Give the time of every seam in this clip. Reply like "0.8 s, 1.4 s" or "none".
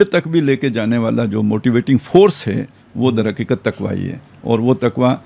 none

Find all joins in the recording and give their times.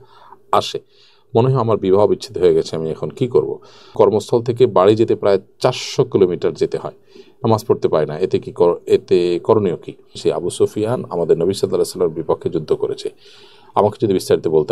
3.9 s, 10.1 s

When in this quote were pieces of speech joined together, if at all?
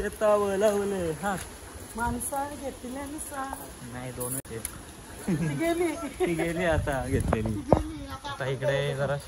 none

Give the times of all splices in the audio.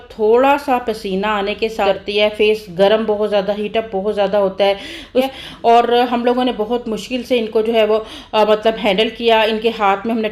1.8 s, 5.3 s

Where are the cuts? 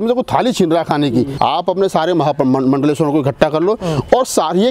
1.3 s

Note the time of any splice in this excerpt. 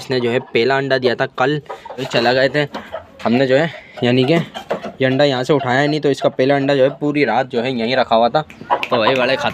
2.0 s, 8.5 s

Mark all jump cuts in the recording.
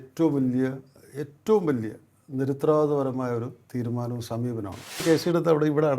5.0 s

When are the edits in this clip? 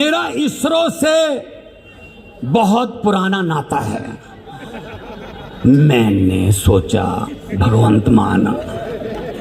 none

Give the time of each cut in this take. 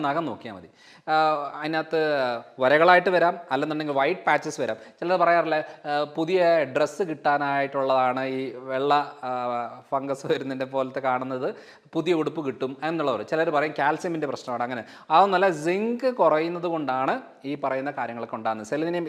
none

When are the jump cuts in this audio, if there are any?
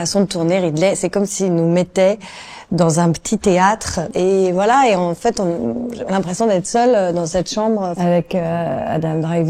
4.1 s, 7.9 s

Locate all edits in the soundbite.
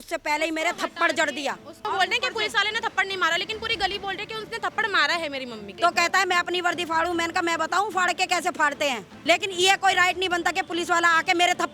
1.8 s, 5.7 s, 9.1 s

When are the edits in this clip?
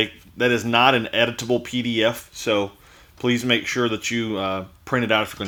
none

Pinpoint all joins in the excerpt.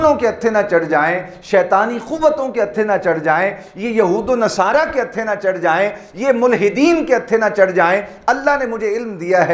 none

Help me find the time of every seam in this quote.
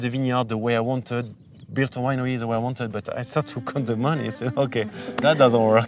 none

